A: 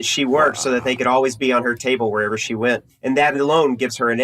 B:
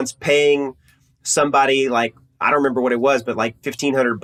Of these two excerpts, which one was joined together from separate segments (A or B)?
A